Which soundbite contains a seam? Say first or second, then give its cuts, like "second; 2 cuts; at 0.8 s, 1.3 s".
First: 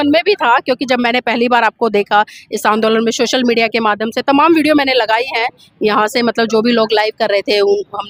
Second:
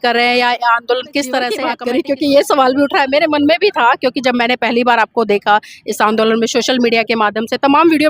second; 1 cut; at 1.7 s